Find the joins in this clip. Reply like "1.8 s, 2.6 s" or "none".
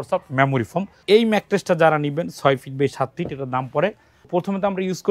1.0 s, 4.3 s